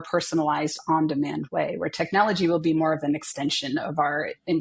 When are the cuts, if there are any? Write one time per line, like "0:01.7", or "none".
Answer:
none